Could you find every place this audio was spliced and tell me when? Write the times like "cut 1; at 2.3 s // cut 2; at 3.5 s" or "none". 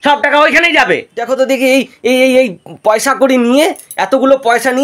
cut 1; at 1.1 s